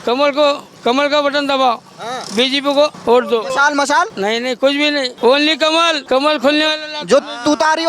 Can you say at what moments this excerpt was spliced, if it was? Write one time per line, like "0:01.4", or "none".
0:03.0
0:04.1
0:05.1
0:06.0